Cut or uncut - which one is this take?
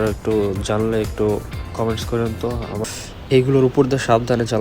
cut